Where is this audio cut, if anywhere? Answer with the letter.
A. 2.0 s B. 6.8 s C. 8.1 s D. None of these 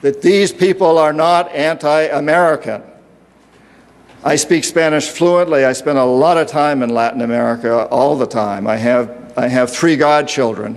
D